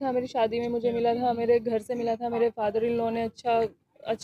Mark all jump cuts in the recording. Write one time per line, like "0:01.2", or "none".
none